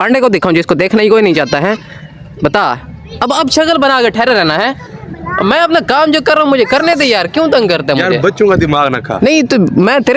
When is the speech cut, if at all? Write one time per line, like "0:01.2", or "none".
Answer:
none